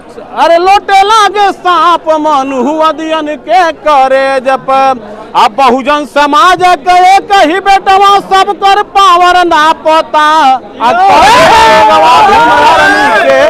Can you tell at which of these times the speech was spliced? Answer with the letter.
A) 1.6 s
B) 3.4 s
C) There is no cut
C